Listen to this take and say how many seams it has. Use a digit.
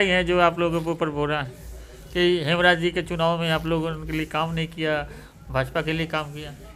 0